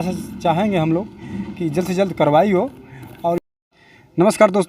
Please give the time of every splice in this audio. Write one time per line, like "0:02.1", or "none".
0:03.4